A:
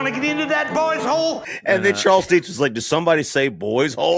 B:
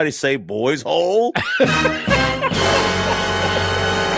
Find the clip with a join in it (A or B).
A